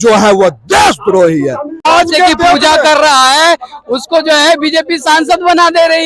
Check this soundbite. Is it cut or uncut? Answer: cut